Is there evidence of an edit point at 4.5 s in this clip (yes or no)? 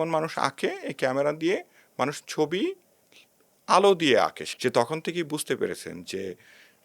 yes